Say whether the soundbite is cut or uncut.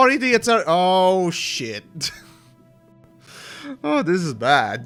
uncut